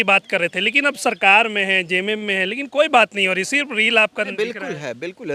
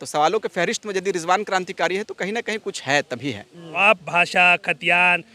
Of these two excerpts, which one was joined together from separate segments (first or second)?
second